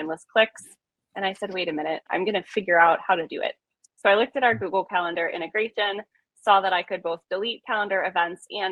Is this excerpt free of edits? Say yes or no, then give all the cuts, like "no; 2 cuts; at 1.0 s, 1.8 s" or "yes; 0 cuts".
no; 1 cut; at 2.0 s